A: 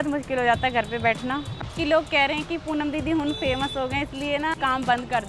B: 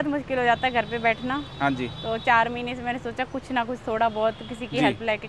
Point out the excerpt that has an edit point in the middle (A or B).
A